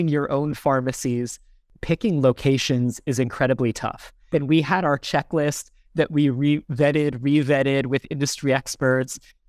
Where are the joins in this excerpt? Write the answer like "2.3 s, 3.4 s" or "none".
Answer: 1.7 s, 4.1 s